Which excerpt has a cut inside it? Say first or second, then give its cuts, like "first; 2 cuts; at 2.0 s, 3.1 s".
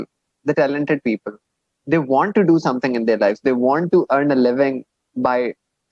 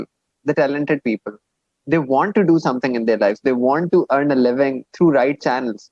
second; 1 cut; at 4.9 s